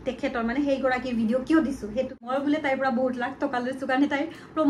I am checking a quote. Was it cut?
yes; 1 cut; at 2.3 s

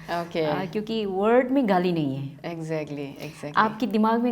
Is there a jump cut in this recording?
no; 0 cuts

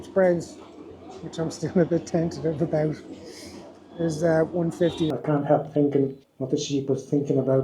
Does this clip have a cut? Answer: yes; 2 cuts; at 5.1 s, 6.3 s

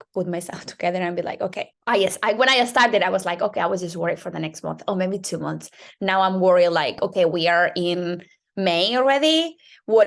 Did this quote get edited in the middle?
yes; 1 cut; at 1.7 s

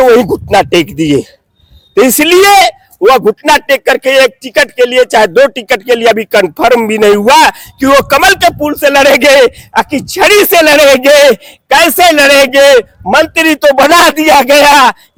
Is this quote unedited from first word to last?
yes; 0 cuts

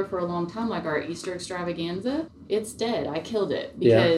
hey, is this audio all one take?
no; 1 cut; at 2.3 s

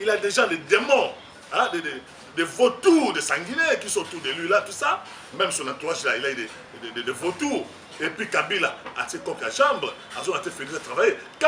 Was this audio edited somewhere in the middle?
no; 0 cuts

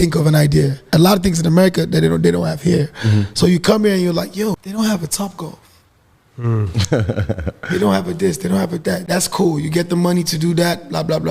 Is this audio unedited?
no; 3 cuts; at 0.9 s, 4.6 s, 9.0 s

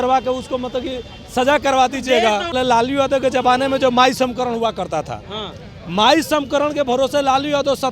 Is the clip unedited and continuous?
no; 1 cut; at 2.5 s

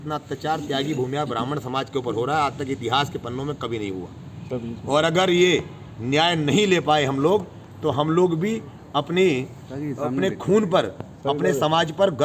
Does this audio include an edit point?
no; 0 cuts

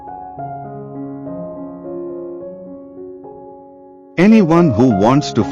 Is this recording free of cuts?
yes; 0 cuts

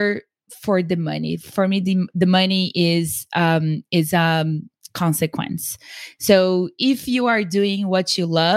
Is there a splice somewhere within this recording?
no; 0 cuts

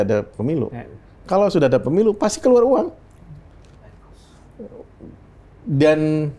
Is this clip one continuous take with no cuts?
yes; 0 cuts

